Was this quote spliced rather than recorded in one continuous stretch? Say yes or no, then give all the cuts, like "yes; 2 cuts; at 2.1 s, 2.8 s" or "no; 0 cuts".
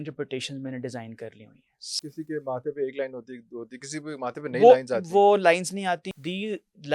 yes; 2 cuts; at 2.0 s, 6.1 s